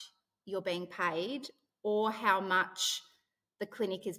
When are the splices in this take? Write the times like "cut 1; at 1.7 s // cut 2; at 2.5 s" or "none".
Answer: none